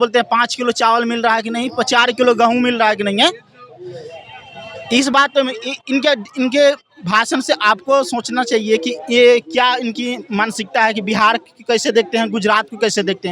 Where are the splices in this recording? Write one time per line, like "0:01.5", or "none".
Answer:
none